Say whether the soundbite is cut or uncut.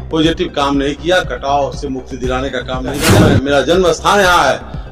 cut